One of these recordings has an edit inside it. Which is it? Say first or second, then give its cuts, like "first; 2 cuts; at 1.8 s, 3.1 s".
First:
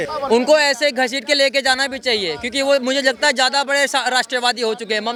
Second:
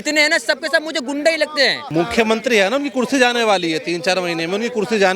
second; 1 cut; at 1.8 s